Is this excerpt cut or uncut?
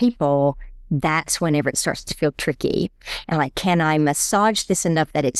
uncut